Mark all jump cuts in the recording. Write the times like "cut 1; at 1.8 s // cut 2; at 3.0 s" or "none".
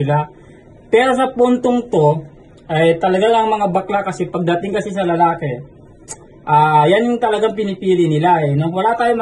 none

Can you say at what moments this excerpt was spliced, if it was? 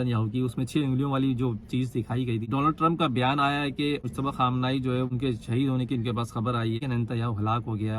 cut 1; at 2.5 s // cut 2; at 4.1 s // cut 3; at 6.8 s

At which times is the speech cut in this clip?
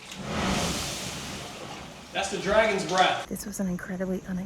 cut 1; at 3.3 s

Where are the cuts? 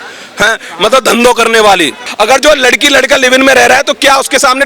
cut 1; at 2.1 s

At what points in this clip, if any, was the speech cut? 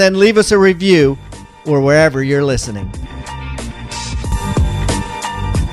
cut 1; at 2.9 s

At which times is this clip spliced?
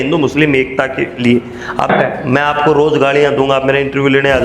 cut 1; at 1.9 s

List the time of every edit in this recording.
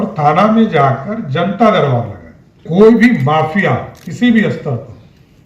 cut 1; at 2.7 s

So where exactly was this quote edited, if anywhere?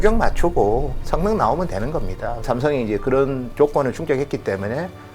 cut 1; at 2.5 s

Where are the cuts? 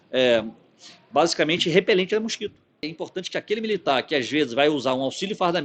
cut 1; at 3.0 s

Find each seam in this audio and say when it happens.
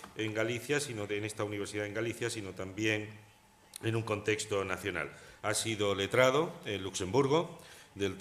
none

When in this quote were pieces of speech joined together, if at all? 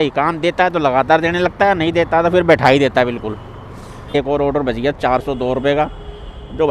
cut 1; at 4.1 s

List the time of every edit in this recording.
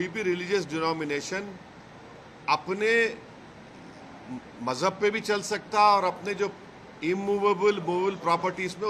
none

